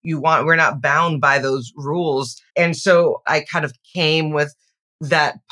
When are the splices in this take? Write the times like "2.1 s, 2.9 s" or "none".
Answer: 2.4 s, 3.3 s